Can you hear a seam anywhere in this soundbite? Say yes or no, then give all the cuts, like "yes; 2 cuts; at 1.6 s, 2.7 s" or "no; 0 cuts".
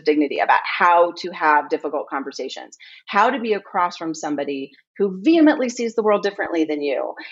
no; 0 cuts